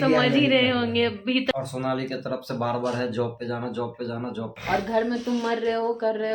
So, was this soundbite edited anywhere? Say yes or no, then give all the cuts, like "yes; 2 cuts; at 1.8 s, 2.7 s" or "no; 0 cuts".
yes; 2 cuts; at 1.5 s, 4.5 s